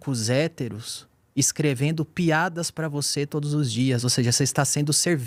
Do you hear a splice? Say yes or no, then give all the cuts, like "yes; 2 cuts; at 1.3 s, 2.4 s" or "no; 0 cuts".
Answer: no; 0 cuts